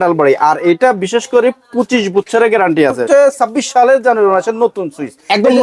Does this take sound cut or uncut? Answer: cut